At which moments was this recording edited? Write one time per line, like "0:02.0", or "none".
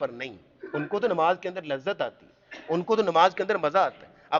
none